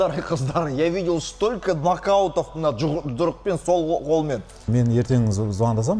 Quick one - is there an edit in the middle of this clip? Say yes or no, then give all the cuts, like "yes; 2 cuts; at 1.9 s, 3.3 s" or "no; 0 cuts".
yes; 1 cut; at 4.7 s